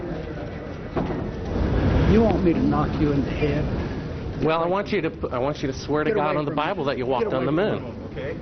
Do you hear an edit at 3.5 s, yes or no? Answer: no